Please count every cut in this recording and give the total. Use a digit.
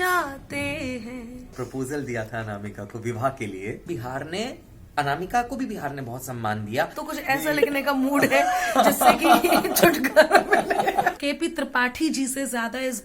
4